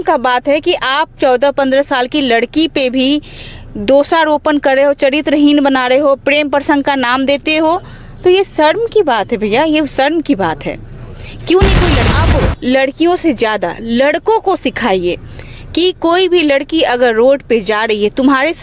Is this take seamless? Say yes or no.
no